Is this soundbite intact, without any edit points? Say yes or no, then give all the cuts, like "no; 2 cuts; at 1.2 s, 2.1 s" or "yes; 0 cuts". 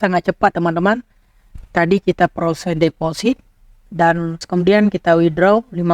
no; 1 cut; at 4.4 s